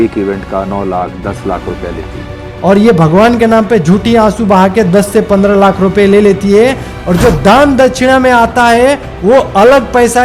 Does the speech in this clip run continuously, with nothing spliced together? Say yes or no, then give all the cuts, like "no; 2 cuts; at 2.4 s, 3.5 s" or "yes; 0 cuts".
yes; 0 cuts